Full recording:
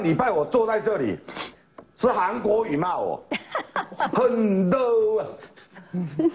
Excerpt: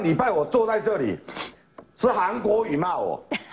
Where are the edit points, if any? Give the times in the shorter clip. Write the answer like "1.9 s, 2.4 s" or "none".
none